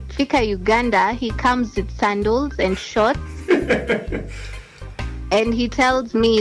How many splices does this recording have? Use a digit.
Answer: 0